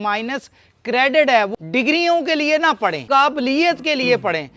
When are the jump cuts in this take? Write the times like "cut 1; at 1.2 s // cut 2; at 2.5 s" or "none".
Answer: cut 1; at 1.6 s // cut 2; at 3.0 s